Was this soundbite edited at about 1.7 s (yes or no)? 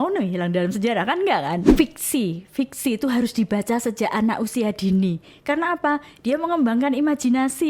yes